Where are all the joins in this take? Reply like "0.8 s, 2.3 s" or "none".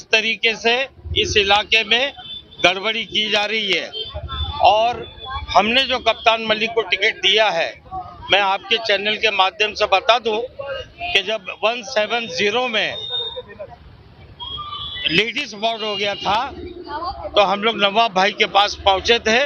none